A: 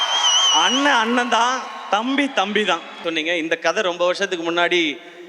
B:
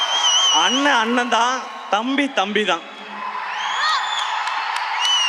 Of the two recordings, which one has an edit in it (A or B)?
A